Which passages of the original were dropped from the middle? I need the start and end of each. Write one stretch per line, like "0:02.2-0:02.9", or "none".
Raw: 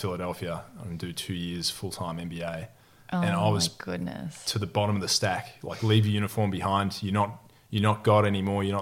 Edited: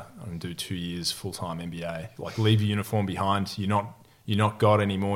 0:02.7-0:05.6